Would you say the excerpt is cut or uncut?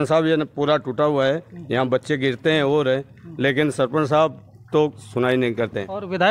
uncut